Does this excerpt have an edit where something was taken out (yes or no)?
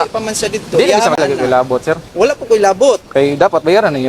yes